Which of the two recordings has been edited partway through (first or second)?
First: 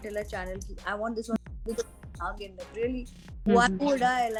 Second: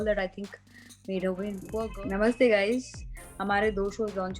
second